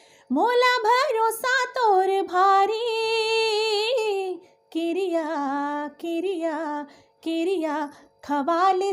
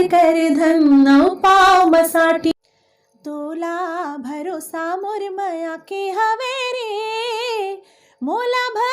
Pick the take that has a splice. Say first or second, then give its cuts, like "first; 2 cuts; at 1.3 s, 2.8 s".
second; 1 cut; at 2.5 s